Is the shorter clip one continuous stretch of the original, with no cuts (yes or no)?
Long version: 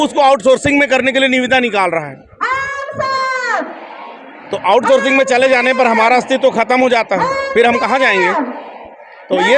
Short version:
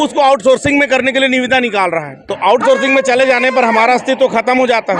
no